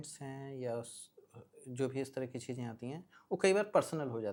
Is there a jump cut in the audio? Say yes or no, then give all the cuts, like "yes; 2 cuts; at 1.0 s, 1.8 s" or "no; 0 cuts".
no; 0 cuts